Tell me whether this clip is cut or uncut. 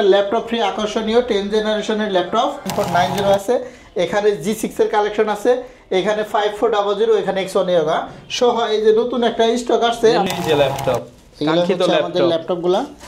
cut